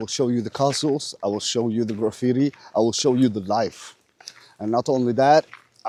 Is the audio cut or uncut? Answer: uncut